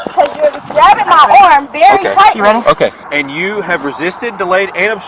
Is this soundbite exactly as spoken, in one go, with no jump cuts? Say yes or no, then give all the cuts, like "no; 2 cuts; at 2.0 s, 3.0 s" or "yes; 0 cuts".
no; 1 cut; at 3.0 s